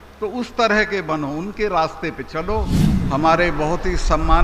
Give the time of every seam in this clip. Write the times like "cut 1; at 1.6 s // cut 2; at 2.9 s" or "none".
cut 1; at 2.8 s